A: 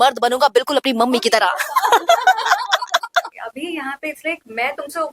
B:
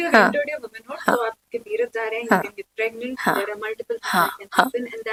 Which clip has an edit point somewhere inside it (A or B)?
A